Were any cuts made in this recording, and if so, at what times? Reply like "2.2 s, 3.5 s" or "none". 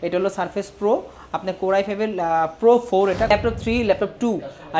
3.3 s